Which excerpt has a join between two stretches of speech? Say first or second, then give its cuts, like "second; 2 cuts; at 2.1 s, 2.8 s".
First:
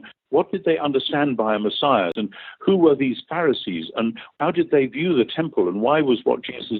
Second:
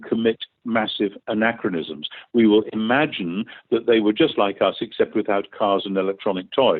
first; 2 cuts; at 2.1 s, 4.3 s